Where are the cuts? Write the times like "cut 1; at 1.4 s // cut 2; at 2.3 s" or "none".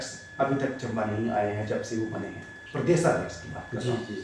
none